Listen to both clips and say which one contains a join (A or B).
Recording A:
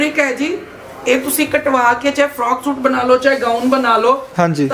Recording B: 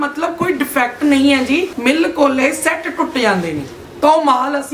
B